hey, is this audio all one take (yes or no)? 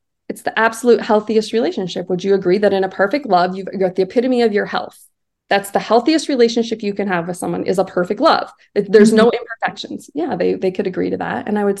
yes